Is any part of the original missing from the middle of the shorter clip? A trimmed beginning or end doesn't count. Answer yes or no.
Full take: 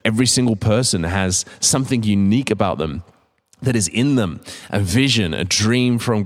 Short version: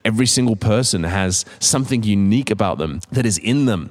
yes